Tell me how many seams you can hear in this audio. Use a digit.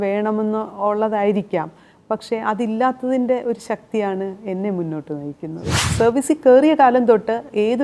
1